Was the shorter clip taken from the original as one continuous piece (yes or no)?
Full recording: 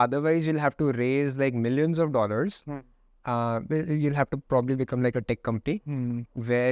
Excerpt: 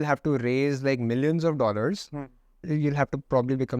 no